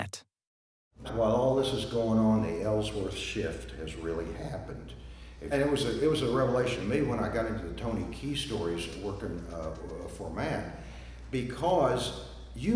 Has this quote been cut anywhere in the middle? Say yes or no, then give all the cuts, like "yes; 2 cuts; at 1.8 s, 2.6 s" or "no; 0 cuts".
yes; 2 cuts; at 1.0 s, 5.4 s